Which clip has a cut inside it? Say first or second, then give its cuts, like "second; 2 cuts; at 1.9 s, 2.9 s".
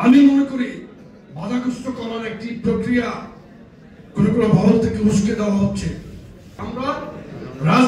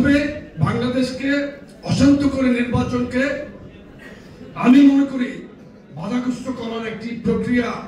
first; 1 cut; at 6.6 s